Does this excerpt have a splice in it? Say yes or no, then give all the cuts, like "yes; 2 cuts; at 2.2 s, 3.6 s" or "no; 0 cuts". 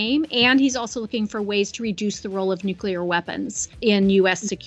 yes; 1 cut; at 3.7 s